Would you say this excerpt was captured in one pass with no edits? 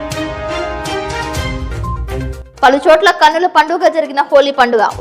yes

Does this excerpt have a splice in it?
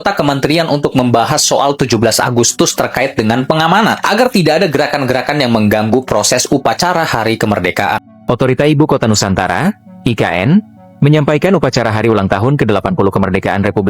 yes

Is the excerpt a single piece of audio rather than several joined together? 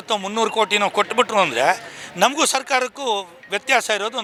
yes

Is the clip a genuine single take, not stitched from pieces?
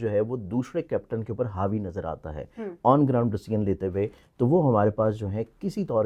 yes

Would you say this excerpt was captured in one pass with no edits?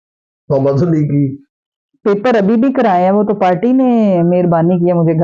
yes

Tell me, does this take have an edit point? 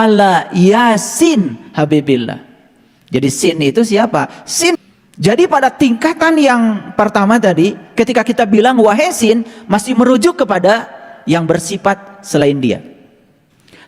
yes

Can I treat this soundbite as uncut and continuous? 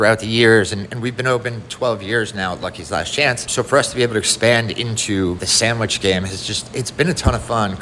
no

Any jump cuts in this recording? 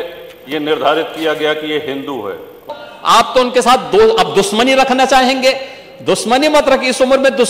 yes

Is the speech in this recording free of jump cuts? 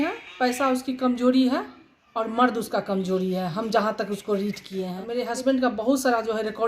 no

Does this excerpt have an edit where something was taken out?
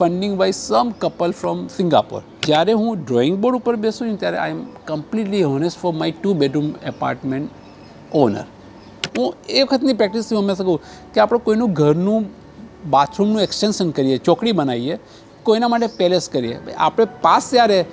yes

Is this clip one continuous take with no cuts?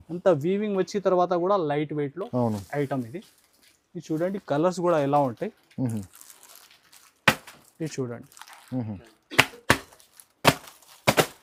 yes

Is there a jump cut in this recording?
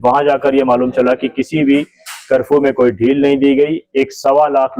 no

